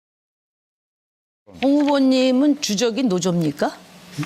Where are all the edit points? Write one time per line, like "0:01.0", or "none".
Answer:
0:02.2